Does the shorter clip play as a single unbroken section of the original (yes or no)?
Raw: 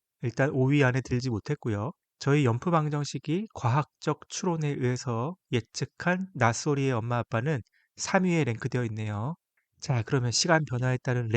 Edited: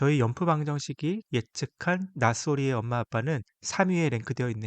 no